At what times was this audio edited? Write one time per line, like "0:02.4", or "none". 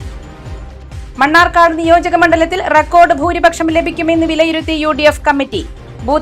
0:01.1